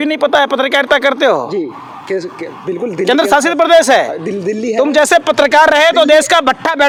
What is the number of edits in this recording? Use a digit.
0